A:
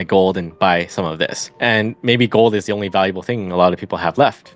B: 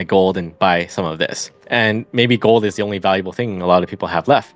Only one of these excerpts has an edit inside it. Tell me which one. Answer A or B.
A